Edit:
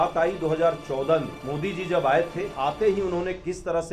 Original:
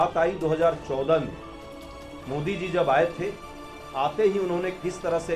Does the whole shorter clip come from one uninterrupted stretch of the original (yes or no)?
no